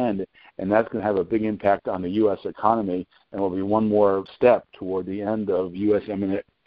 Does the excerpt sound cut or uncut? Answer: cut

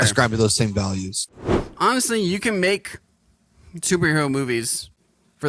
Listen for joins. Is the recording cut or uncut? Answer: cut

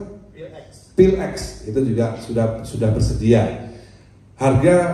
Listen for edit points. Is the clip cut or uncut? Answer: uncut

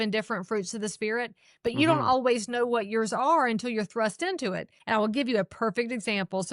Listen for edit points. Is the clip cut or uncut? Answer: cut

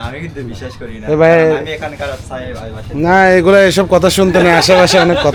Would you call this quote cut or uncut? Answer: uncut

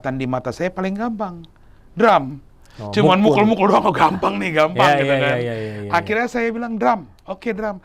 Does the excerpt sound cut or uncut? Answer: uncut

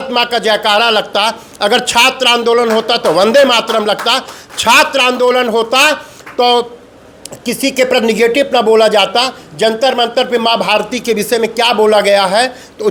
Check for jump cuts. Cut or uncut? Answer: uncut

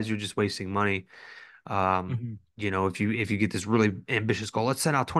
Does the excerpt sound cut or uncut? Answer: uncut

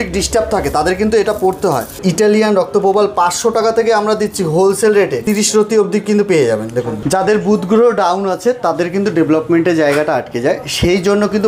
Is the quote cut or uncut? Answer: cut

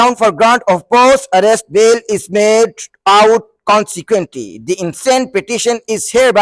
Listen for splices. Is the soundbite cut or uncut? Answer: uncut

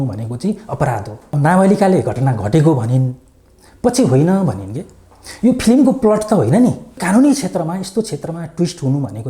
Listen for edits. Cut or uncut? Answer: cut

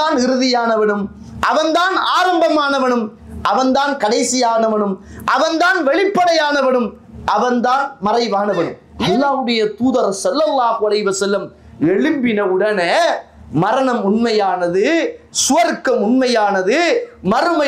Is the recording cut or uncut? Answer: cut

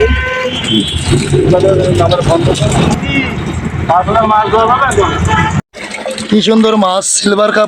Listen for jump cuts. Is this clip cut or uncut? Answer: cut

